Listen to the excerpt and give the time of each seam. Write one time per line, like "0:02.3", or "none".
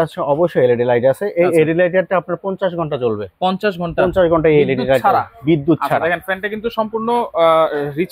none